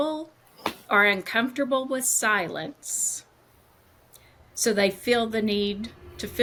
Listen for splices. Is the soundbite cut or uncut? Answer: uncut